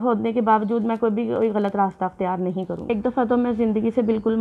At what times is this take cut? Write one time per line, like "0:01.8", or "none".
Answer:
0:02.8